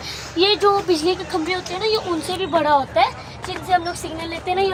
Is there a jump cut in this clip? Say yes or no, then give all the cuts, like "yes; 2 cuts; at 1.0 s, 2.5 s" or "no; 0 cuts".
no; 0 cuts